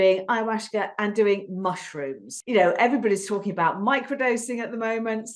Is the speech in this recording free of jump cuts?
no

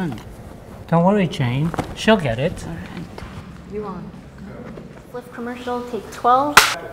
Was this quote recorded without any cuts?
no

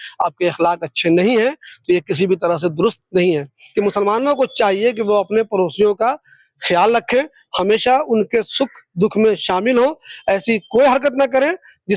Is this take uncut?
no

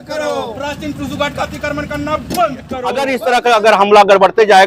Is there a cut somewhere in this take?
yes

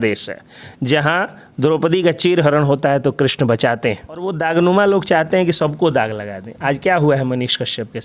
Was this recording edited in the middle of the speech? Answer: yes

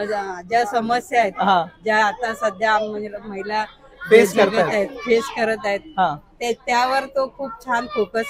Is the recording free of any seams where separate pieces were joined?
yes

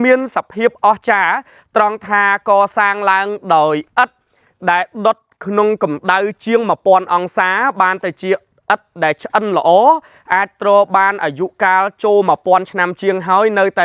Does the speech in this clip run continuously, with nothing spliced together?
yes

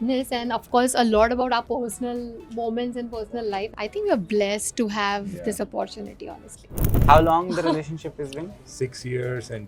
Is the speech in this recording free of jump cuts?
no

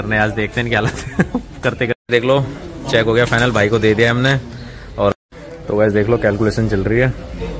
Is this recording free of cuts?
no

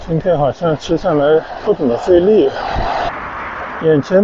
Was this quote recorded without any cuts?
no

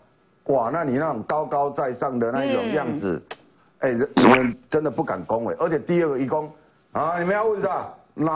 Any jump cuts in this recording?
no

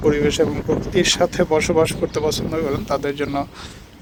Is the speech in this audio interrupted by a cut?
no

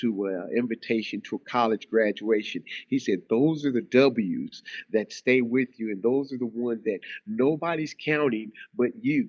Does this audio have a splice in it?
no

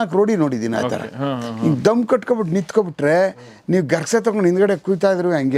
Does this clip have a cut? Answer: no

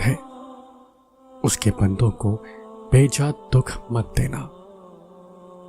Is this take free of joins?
no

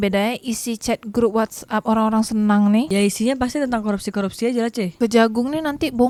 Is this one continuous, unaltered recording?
yes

